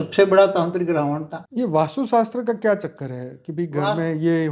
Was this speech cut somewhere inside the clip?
yes; 1 cut; at 1.4 s

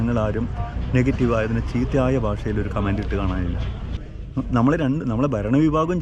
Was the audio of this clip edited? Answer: yes; 1 cut; at 3.9 s

